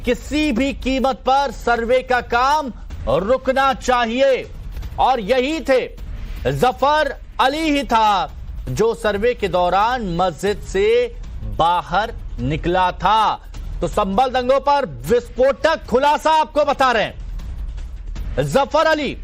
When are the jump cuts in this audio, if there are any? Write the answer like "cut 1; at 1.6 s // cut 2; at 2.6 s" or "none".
cut 1; at 4.1 s